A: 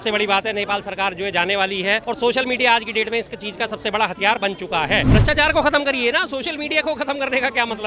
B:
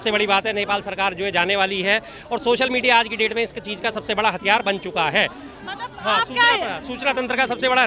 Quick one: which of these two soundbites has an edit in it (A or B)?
A